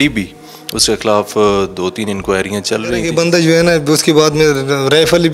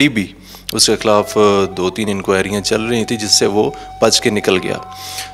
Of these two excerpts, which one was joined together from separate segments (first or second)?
first